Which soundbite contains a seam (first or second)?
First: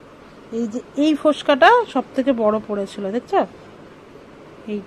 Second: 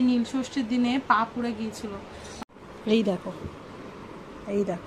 second